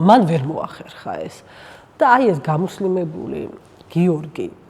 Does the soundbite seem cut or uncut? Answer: uncut